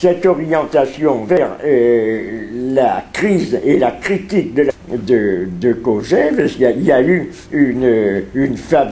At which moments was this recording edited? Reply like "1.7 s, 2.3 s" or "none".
none